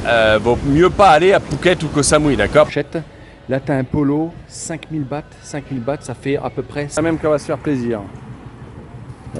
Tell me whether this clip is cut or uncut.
cut